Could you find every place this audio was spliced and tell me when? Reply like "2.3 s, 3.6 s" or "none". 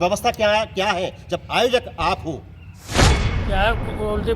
3.0 s